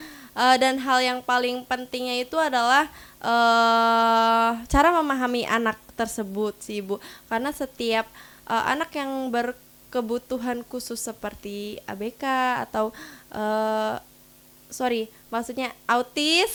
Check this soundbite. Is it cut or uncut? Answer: uncut